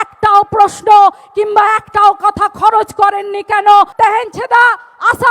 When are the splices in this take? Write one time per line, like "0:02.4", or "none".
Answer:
0:03.9